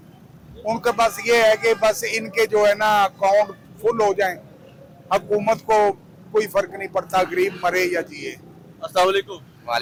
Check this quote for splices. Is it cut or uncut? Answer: uncut